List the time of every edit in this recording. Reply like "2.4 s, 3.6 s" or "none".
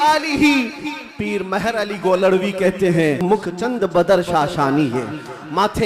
3.2 s